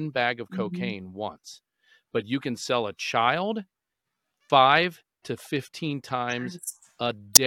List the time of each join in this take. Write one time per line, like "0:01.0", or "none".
none